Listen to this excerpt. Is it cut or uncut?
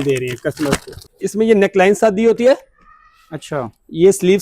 cut